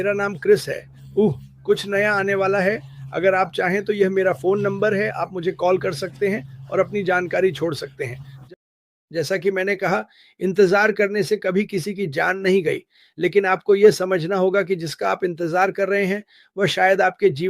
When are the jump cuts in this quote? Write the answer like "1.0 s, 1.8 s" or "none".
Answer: 8.3 s